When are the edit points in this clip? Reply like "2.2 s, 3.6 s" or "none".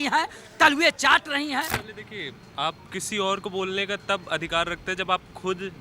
1.8 s